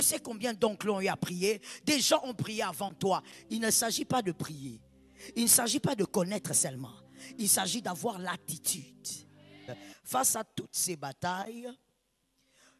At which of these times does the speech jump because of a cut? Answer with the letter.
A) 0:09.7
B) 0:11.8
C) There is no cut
A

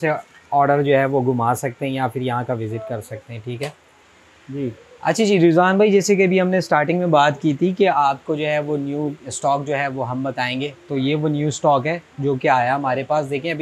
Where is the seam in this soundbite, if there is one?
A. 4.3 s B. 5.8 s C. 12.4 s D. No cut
A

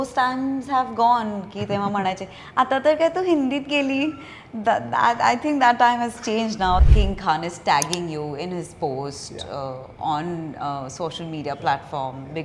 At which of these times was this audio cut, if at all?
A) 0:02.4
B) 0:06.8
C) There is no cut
B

